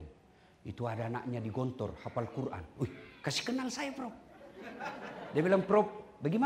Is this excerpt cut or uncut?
uncut